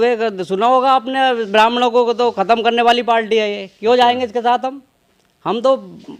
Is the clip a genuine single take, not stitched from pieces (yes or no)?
yes